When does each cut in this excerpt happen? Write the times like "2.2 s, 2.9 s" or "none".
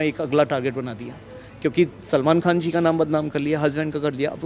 none